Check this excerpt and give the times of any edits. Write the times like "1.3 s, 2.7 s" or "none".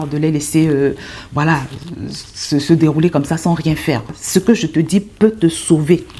4.2 s